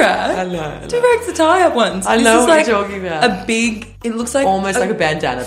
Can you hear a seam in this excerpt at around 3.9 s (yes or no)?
yes